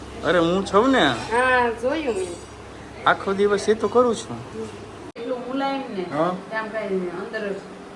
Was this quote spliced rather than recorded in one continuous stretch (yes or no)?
yes